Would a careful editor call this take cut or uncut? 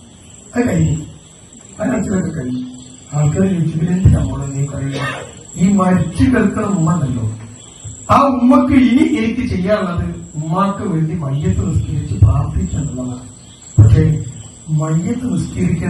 uncut